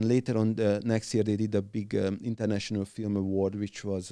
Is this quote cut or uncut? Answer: uncut